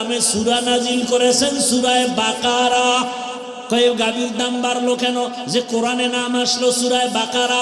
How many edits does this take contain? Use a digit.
1